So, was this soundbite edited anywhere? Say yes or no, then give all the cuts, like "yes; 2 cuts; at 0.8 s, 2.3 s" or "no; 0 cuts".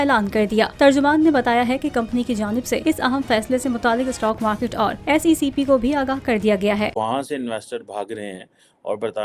yes; 1 cut; at 6.9 s